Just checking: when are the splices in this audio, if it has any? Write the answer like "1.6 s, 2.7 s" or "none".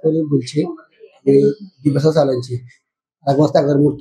none